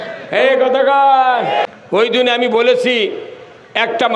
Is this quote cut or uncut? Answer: cut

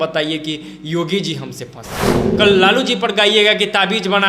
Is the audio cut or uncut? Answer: cut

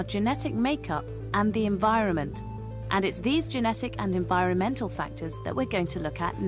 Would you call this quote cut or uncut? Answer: uncut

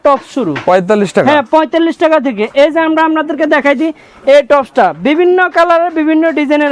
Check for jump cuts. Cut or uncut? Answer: uncut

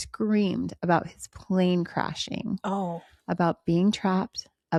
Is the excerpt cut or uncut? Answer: uncut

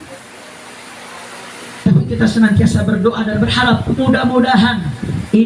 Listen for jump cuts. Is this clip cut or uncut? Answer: uncut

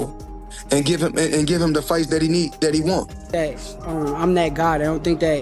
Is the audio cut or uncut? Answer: cut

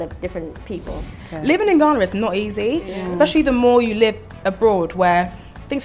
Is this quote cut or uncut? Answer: cut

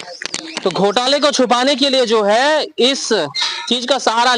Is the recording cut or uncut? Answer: uncut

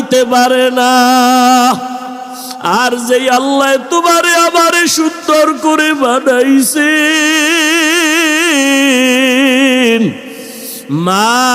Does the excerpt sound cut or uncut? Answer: uncut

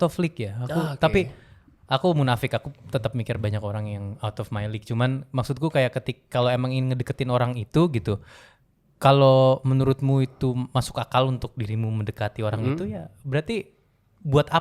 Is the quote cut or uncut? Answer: uncut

